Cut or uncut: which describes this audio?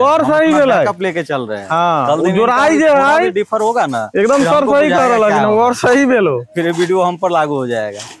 uncut